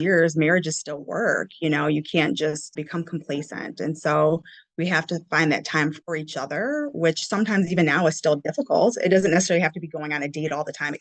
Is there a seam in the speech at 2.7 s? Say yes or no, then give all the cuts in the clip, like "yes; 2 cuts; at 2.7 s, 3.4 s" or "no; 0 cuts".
yes; 2 cuts; at 2.7 s, 6.0 s